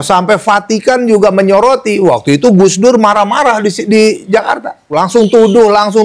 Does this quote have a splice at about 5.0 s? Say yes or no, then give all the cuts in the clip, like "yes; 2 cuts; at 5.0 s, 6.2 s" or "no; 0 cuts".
yes; 1 cut; at 5.0 s